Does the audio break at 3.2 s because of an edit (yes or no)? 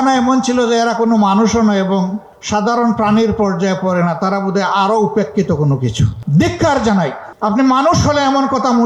no